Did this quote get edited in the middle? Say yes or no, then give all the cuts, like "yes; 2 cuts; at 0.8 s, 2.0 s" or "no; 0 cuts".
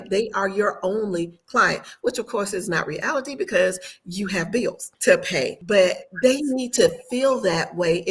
yes; 2 cuts; at 4.9 s, 5.6 s